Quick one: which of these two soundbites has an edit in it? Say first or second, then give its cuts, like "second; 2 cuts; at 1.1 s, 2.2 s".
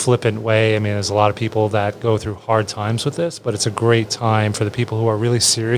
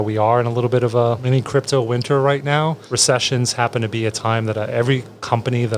second; 2 cuts; at 1.2 s, 2.8 s